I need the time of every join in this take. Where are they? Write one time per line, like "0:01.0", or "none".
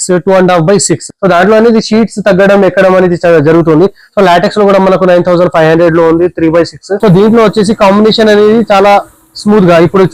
0:01.1
0:06.8